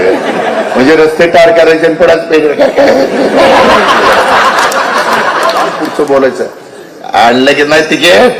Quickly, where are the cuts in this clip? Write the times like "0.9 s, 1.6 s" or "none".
5.8 s